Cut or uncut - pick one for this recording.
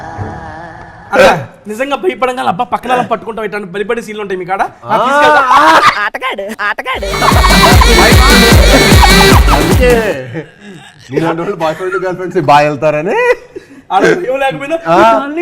cut